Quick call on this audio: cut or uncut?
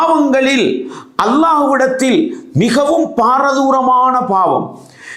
uncut